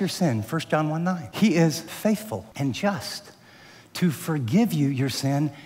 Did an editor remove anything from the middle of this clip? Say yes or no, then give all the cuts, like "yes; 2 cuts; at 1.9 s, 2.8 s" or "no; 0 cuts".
yes; 2 cuts; at 1.3 s, 1.9 s